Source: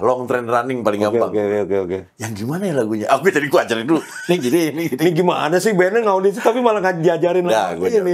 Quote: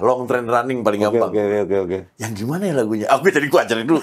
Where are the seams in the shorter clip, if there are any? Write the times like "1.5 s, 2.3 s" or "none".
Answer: none